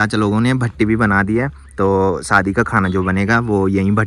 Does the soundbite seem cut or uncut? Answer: uncut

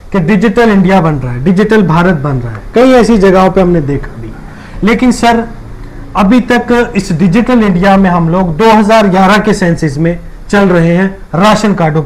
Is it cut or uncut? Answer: uncut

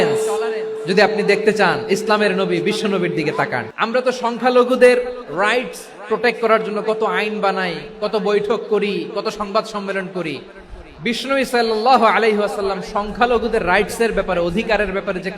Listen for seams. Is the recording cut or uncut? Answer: cut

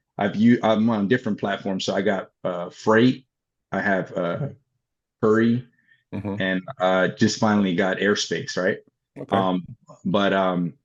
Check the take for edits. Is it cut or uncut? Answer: uncut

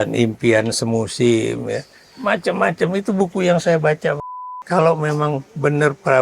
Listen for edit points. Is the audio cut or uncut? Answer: cut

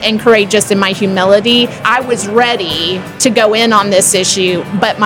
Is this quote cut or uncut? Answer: cut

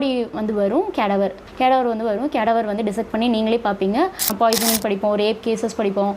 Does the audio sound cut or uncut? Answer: cut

